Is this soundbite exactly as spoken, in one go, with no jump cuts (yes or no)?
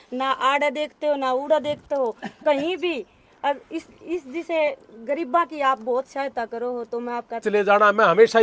no